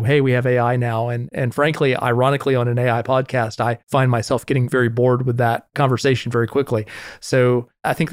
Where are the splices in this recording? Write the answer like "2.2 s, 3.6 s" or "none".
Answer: none